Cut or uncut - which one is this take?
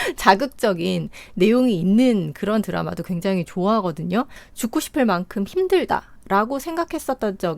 cut